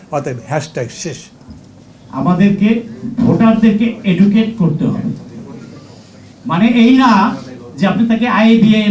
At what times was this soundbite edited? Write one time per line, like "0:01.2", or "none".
0:01.4